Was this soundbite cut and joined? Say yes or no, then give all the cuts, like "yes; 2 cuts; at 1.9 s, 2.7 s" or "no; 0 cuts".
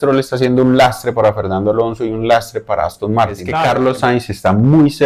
yes; 1 cut; at 3.5 s